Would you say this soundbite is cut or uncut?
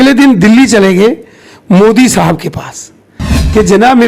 uncut